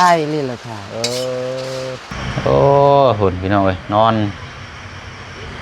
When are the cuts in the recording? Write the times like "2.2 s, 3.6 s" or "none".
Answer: 2.1 s